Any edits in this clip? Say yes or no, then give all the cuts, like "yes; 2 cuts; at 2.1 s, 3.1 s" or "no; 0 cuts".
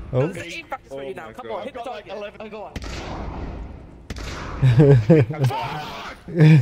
yes; 1 cut; at 2.4 s